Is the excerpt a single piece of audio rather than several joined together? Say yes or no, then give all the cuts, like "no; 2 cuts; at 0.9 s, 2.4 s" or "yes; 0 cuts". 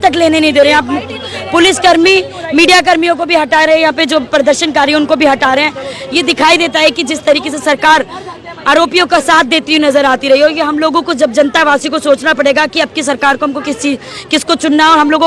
yes; 0 cuts